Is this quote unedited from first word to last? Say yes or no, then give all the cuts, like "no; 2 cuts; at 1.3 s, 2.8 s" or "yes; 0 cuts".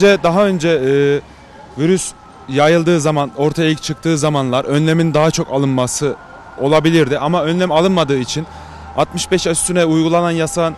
yes; 0 cuts